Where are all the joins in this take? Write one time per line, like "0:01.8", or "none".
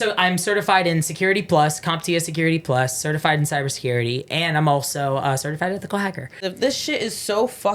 0:06.5